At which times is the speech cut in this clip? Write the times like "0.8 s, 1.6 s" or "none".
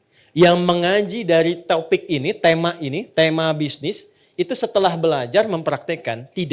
none